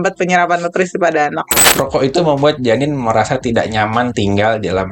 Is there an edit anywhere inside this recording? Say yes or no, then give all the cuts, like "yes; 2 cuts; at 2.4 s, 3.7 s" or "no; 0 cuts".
yes; 1 cut; at 1.6 s